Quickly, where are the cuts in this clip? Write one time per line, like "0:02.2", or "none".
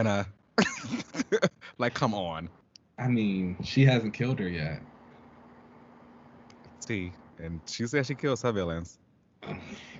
none